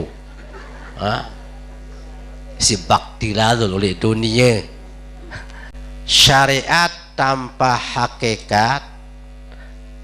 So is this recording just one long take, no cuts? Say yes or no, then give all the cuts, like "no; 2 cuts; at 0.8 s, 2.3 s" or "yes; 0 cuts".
no; 1 cut; at 5.7 s